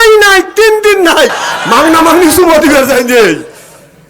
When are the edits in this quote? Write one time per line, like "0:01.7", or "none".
0:01.5

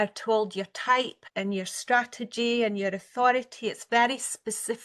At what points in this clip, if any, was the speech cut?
0:01.2

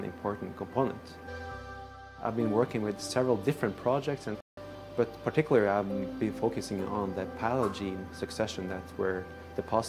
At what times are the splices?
0:01.3
0:04.4

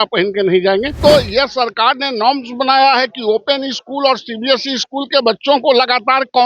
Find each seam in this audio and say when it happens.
0:00.9

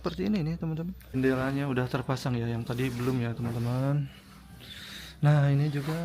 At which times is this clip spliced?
0:01.1

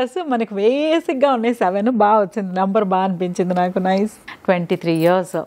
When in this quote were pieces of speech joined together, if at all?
0:04.3

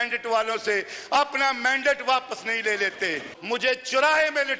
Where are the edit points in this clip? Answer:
0:03.3

